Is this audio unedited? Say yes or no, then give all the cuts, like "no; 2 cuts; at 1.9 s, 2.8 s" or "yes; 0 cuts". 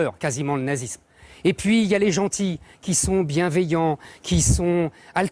yes; 0 cuts